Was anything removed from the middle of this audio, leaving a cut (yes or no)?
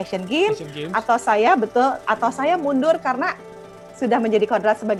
no